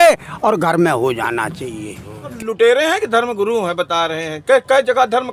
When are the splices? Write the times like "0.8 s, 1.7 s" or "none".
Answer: 2.4 s